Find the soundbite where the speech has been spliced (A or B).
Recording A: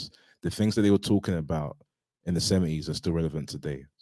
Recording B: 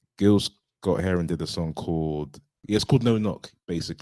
B